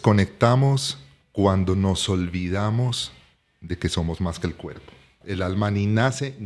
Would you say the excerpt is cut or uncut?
cut